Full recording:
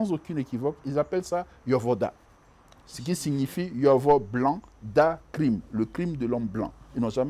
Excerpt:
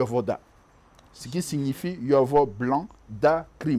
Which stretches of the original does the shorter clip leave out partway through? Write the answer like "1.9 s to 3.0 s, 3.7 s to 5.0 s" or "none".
none